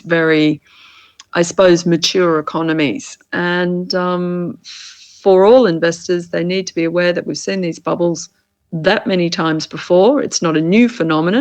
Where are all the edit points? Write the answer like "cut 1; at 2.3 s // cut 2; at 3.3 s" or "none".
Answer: cut 1; at 3.2 s